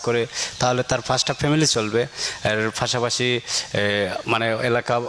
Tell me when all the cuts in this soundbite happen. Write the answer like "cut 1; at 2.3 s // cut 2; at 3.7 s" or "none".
none